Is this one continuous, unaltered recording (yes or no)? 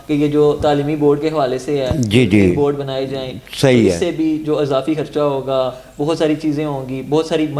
yes